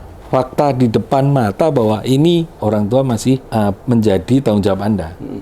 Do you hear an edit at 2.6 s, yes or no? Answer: yes